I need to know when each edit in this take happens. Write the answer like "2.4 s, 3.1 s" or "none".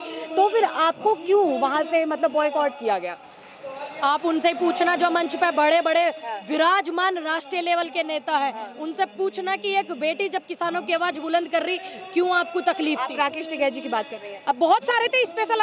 none